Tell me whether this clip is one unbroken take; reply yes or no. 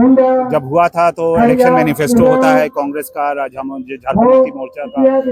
yes